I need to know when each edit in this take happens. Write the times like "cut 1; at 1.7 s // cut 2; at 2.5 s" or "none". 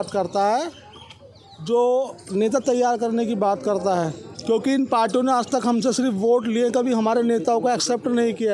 none